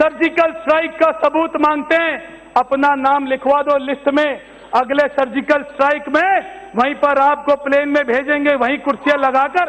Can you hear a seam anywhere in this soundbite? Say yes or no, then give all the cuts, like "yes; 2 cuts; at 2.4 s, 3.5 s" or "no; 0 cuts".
no; 0 cuts